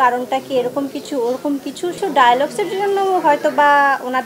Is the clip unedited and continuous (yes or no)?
no